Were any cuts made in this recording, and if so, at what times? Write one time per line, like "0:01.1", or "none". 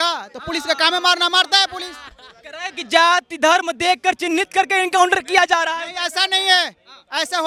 none